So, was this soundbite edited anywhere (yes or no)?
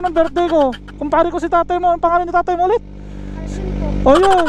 yes